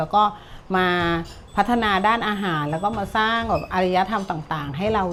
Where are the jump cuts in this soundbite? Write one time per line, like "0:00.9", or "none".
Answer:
none

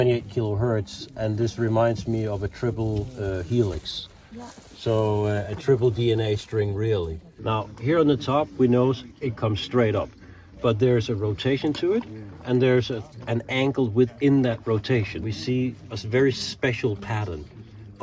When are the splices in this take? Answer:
0:07.2
0:15.3

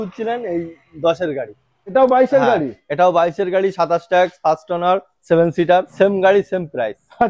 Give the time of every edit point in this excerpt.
0:01.7
0:05.9

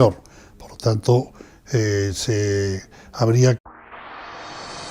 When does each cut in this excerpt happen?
none

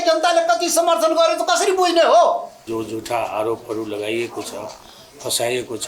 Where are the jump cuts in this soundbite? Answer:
0:02.6

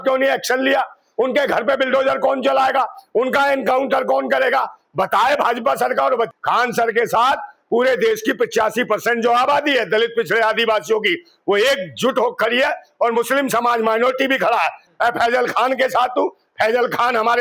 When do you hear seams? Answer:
0:06.3
0:14.8

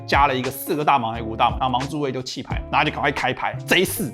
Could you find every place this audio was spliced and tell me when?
0:01.6

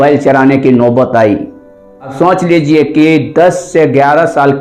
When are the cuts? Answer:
0:02.1

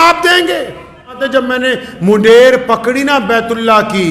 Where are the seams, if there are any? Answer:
0:01.2

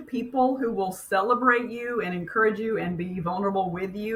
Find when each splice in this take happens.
none

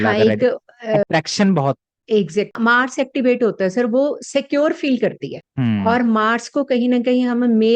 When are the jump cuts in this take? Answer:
0:02.5

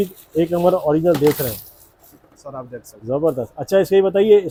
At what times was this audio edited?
none

